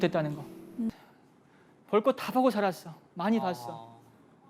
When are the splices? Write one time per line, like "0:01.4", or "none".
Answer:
0:00.9